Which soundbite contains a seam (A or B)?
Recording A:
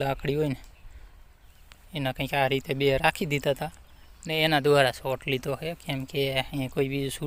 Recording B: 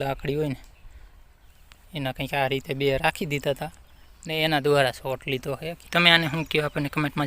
B